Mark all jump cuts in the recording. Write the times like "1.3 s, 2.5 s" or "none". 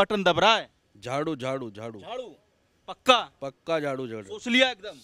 none